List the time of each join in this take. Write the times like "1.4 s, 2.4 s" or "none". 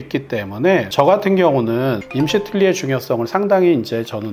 0.9 s, 2.0 s